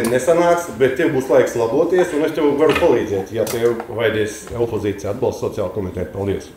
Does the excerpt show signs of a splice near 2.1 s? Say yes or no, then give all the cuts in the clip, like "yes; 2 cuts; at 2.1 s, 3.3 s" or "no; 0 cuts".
no; 0 cuts